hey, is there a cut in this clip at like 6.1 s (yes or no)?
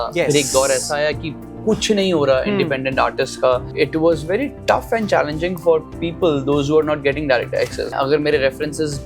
no